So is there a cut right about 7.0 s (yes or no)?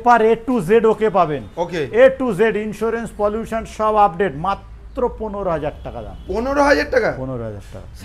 no